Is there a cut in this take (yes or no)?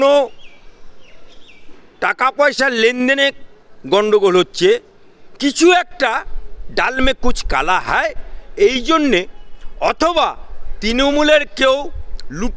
no